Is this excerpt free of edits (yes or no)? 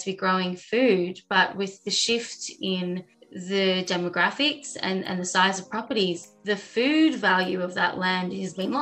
yes